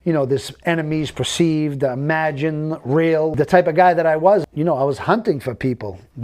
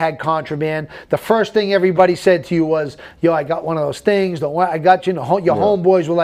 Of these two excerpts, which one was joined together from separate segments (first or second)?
first